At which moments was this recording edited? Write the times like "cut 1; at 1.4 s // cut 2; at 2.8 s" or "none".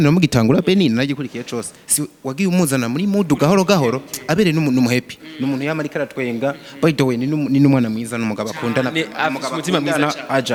none